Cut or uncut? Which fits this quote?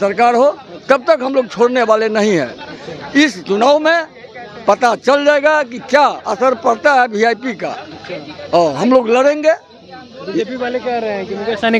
uncut